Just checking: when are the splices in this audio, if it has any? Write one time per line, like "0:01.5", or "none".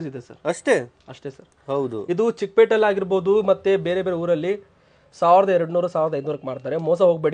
none